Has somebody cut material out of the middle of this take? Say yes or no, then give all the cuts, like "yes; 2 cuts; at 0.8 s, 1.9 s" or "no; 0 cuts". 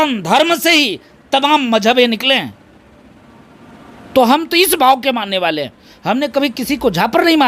no; 0 cuts